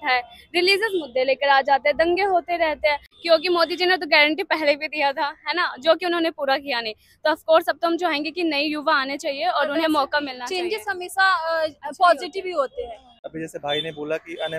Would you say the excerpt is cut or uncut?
cut